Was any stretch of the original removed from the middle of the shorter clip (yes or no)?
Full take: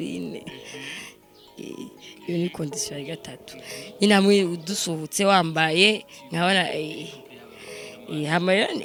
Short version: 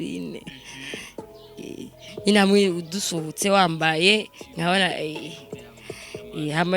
yes